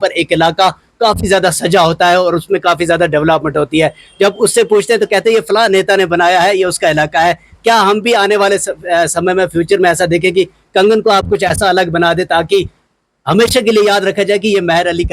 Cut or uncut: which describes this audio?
uncut